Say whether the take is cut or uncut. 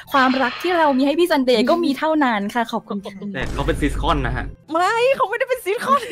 cut